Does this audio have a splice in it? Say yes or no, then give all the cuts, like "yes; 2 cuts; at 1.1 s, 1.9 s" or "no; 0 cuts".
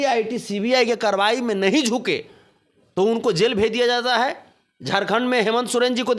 no; 0 cuts